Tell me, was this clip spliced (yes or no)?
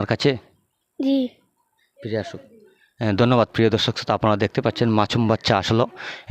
no